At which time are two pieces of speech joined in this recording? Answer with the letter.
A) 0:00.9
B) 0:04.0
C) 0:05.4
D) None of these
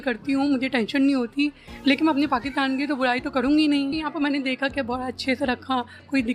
B